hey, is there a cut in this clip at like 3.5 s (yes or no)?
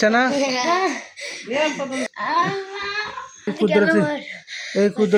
yes